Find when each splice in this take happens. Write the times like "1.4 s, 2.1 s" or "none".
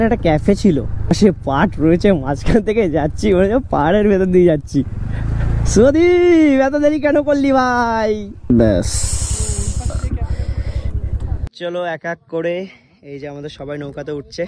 none